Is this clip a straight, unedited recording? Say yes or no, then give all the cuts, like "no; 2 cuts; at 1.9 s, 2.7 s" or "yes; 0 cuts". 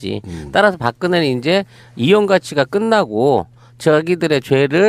yes; 0 cuts